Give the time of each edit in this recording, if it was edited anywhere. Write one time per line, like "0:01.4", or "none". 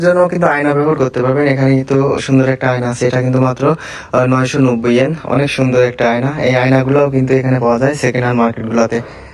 none